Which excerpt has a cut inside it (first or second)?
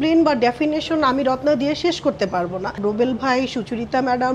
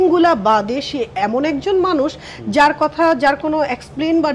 first